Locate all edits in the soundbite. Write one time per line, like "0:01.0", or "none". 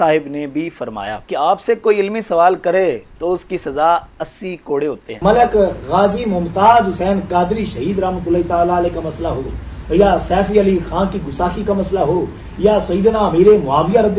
0:01.2
0:05.1